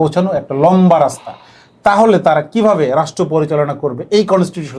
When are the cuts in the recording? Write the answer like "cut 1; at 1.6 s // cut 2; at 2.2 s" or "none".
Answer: none